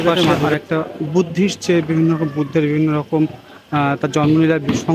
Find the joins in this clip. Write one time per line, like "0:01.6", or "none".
none

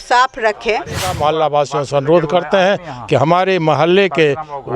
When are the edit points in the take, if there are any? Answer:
0:01.1

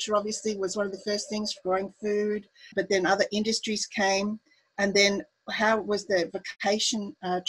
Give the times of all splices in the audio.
0:02.7
0:06.5

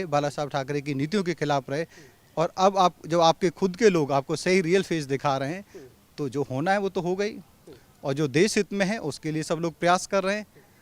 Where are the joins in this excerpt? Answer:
none

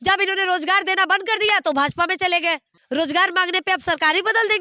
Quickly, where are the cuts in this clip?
0:02.7

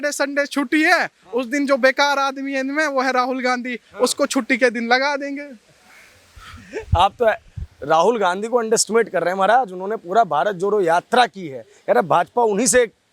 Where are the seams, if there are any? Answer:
none

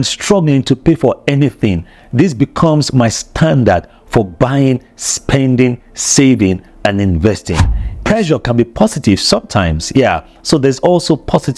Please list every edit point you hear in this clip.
0:07.8

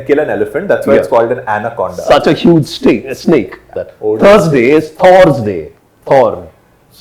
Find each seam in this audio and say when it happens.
0:03.7

